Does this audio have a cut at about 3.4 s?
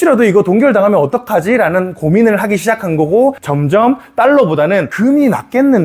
yes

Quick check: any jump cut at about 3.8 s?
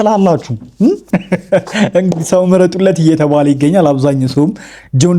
no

